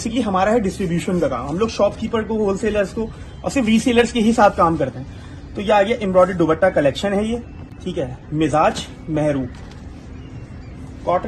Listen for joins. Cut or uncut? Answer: uncut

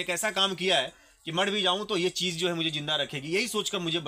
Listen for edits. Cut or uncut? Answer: uncut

